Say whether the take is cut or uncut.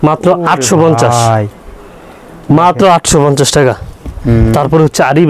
uncut